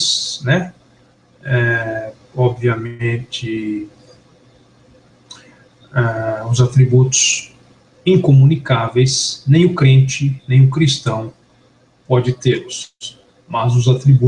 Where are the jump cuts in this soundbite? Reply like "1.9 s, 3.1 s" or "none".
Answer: 10.1 s